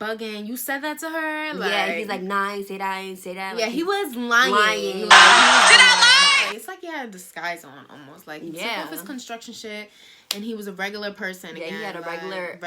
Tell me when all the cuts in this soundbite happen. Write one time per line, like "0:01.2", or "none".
0:06.5